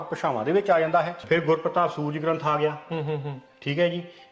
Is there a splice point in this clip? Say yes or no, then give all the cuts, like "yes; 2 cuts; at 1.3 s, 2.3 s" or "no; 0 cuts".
yes; 1 cut; at 1.2 s